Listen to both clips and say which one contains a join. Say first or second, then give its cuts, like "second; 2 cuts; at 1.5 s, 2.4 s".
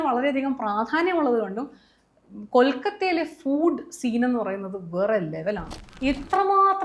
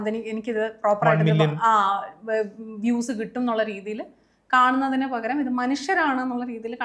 first; 1 cut; at 5.7 s